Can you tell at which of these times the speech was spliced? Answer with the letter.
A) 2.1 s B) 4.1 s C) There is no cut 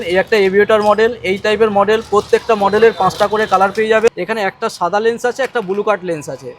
B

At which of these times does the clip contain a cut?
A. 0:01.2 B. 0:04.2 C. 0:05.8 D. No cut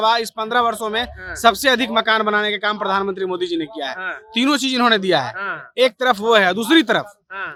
D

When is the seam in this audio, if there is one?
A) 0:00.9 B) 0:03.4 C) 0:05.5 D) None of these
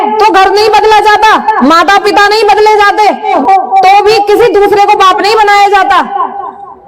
B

